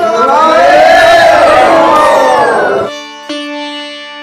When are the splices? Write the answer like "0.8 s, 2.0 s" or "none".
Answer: 2.9 s